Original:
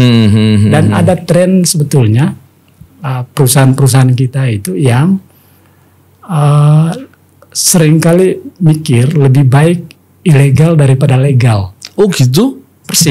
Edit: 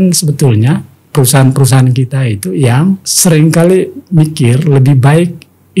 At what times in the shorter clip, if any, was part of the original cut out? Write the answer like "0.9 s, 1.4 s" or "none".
1.0 s, 3.1 s